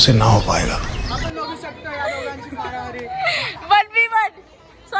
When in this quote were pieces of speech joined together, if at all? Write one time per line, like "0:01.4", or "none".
0:01.0